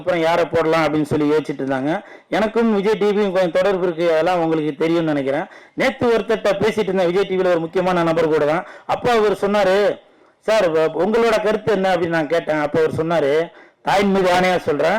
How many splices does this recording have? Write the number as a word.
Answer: zero